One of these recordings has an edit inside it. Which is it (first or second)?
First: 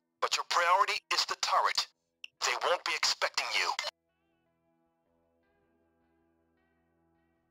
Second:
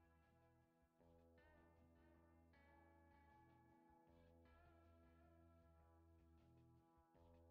first